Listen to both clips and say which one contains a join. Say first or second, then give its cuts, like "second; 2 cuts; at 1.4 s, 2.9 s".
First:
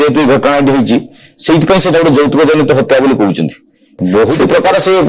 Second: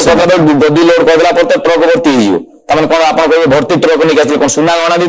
first; 1 cut; at 4.0 s